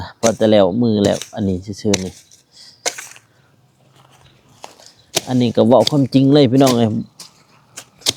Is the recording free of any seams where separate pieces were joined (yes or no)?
yes